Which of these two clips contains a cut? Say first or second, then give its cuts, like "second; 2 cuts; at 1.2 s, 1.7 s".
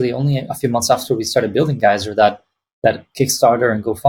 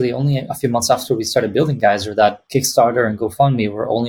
second; 1 cut; at 2.4 s